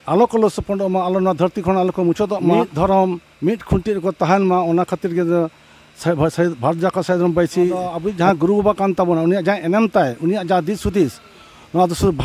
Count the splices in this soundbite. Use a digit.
2